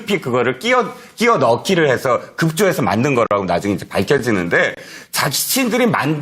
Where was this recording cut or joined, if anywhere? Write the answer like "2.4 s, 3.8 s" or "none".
2.9 s

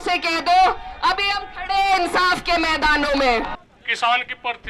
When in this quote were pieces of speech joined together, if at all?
3.6 s

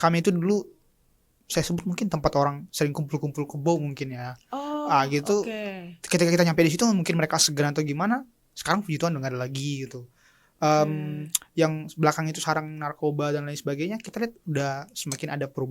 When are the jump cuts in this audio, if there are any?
none

